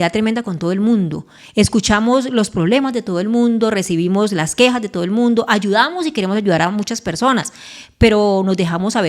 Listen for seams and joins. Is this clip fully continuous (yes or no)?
yes